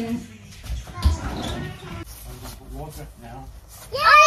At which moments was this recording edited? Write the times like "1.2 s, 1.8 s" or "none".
2.0 s